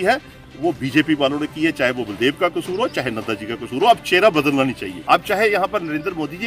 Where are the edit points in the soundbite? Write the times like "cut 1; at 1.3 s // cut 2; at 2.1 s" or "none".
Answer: none